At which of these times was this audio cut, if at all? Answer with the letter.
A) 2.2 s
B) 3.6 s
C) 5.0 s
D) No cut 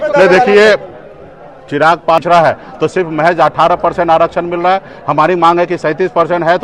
A